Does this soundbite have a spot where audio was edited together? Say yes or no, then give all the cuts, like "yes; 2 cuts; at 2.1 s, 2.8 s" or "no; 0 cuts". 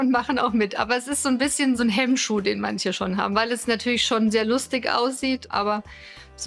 yes; 2 cuts; at 1.8 s, 5.5 s